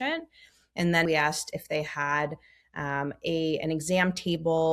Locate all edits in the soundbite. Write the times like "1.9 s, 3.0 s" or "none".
1.1 s